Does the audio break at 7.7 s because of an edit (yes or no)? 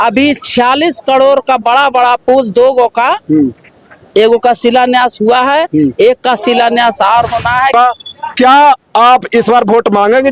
yes